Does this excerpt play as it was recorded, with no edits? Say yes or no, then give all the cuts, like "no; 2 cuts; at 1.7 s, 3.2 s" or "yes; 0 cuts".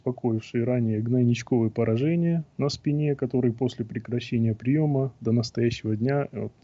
yes; 0 cuts